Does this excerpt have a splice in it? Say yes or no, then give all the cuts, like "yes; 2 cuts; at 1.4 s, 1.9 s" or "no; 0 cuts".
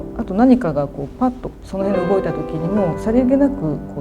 yes; 1 cut; at 3.0 s